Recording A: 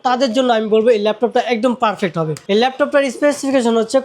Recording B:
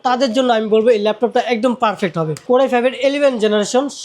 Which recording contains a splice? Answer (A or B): B